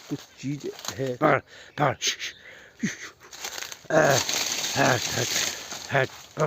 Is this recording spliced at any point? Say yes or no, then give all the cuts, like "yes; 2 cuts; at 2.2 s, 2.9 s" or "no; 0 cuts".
yes; 1 cut; at 1.1 s